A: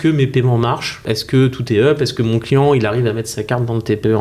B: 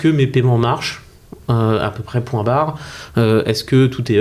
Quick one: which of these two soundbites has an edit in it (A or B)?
A